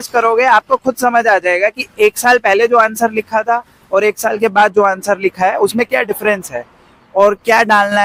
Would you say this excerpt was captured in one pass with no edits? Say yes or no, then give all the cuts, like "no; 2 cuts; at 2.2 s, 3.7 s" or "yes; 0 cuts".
yes; 0 cuts